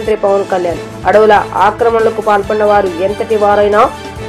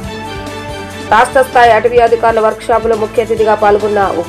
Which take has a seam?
second; 1 cut; at 0.9 s

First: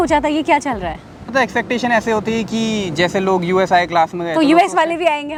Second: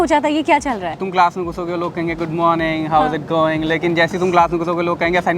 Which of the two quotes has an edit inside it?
second; 1 cut; at 1.0 s

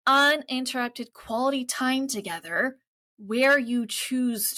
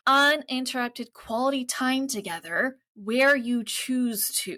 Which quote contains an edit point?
second; 1 cut; at 2.9 s

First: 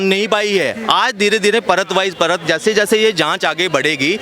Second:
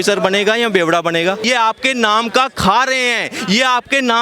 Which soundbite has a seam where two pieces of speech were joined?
second; 1 cut; at 1.4 s

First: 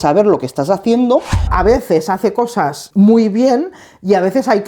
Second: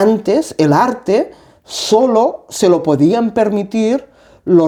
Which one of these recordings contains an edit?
first; 2 cuts; at 1.5 s, 2.8 s

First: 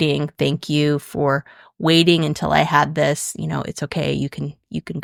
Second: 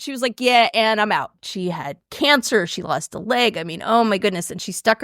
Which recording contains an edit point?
second; 1 cut; at 1.4 s

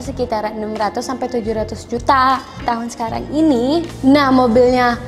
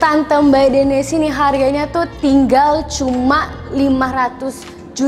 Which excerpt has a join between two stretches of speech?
first; 1 cut; at 2.6 s

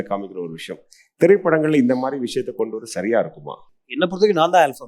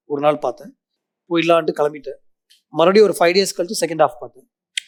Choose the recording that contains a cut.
first; 1 cut; at 4.0 s

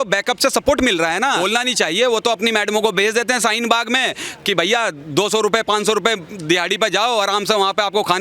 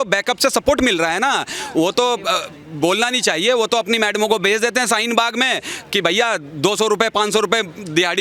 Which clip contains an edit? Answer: first; 1 cut; at 1.4 s

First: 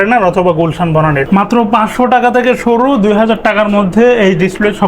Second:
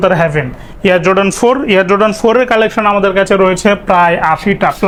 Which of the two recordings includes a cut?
first; 1 cut; at 1.2 s

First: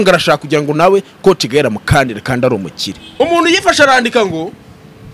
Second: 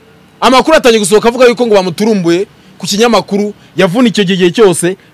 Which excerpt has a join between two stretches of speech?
first; 1 cut; at 3.0 s

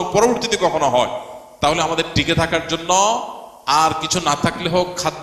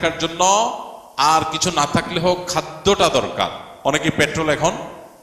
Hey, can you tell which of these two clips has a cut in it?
second; 1 cut; at 3.7 s

